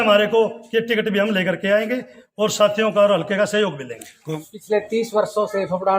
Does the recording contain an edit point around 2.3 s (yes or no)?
no